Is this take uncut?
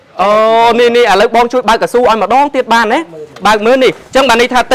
yes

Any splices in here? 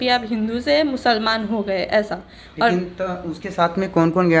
no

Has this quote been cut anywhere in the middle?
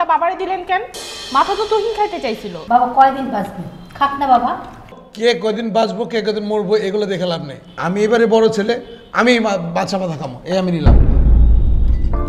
yes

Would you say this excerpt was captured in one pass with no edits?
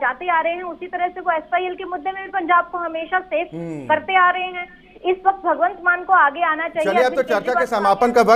yes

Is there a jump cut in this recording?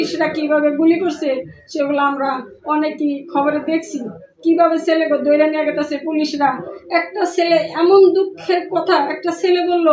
no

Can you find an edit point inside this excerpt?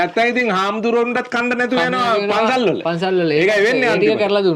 no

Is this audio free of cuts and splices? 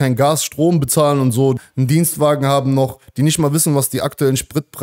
no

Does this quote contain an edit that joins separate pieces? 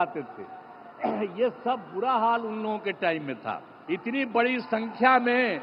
yes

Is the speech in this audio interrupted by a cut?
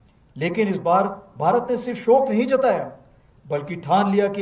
no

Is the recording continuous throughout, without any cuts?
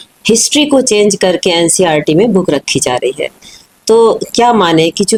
yes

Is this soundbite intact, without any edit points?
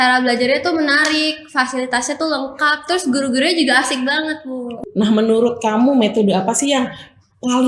no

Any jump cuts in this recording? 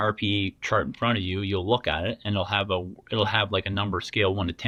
no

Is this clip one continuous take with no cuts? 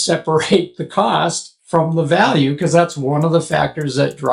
yes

